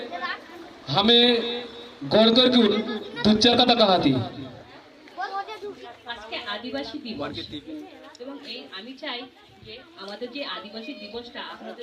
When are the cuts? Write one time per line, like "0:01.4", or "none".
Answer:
0:05.9